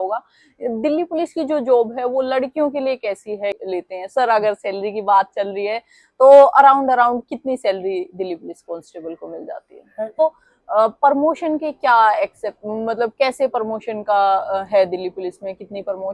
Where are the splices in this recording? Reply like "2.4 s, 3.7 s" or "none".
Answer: 3.6 s, 10.2 s